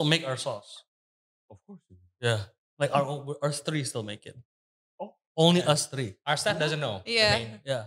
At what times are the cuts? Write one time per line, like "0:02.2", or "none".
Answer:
none